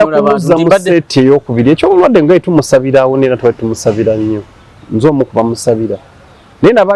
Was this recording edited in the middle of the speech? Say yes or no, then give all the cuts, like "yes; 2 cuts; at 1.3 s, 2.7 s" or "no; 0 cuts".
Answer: no; 0 cuts